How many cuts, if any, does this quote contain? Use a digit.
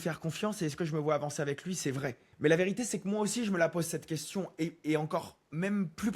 1